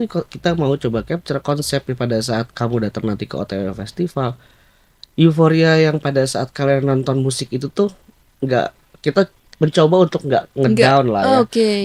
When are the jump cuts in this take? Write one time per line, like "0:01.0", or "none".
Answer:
none